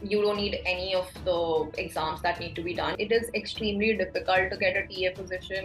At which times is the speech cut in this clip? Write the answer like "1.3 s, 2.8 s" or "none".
2.9 s